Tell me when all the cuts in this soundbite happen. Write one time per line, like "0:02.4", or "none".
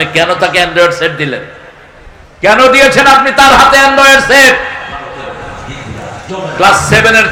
none